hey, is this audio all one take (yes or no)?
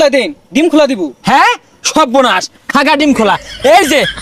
yes